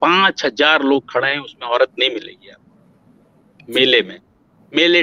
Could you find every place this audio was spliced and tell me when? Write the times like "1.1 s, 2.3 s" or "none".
none